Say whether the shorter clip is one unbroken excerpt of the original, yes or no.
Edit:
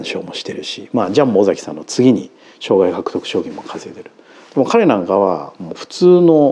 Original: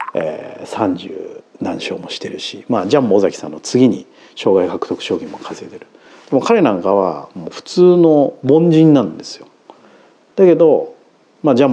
yes